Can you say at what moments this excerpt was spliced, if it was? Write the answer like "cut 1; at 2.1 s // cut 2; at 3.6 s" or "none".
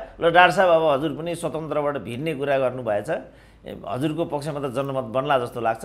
none